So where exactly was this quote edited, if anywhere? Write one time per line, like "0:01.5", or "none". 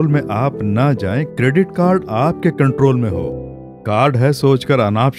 none